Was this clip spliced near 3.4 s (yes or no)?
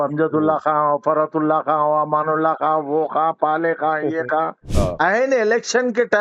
no